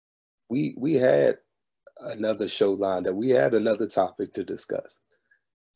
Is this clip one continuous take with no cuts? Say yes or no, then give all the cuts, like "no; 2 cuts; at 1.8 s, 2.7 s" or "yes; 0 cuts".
yes; 0 cuts